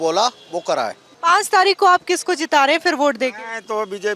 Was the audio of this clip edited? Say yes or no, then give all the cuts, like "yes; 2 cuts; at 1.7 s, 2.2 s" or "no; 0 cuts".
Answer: yes; 1 cut; at 1.1 s